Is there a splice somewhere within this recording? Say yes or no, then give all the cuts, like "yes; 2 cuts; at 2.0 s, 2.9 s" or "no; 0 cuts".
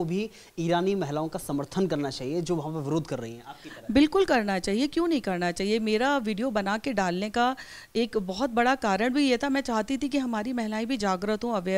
no; 0 cuts